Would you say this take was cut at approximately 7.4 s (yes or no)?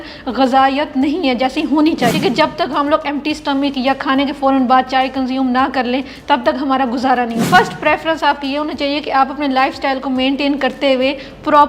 yes